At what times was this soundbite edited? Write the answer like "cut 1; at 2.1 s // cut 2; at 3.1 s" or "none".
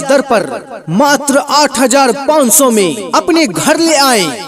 none

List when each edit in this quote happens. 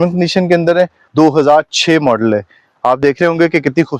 cut 1; at 1.0 s

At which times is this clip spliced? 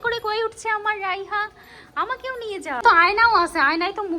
cut 1; at 2.8 s

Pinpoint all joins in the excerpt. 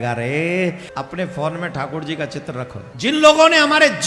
cut 1; at 0.8 s // cut 2; at 2.8 s

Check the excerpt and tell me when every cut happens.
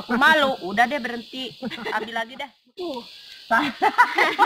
cut 1; at 2.7 s

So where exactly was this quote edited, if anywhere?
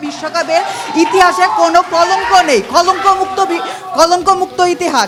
none

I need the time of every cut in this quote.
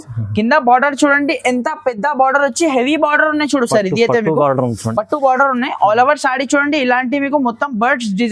none

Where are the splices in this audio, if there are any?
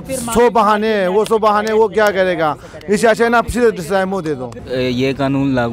cut 1; at 4.6 s

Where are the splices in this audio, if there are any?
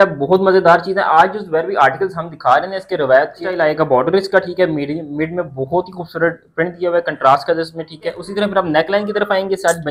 cut 1; at 3.6 s // cut 2; at 8.2 s

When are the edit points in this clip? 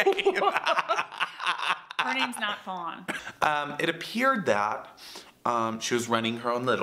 cut 1; at 3.2 s

